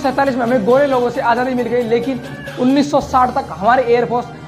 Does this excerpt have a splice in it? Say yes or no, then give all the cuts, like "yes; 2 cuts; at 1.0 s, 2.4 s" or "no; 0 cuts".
no; 0 cuts